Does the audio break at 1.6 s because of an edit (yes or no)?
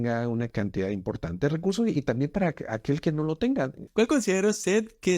no